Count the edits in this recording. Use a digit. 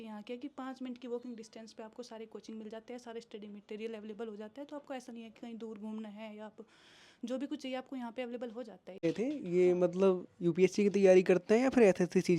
1